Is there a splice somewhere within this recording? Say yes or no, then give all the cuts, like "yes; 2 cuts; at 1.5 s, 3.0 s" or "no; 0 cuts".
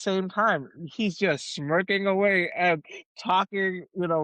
no; 0 cuts